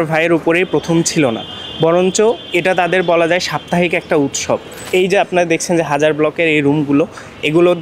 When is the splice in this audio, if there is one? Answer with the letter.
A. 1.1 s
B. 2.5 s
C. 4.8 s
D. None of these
C